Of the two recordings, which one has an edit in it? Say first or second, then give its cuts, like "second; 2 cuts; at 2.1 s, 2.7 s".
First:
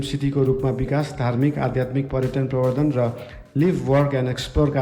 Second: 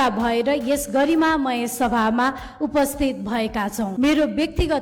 second; 1 cut; at 3.9 s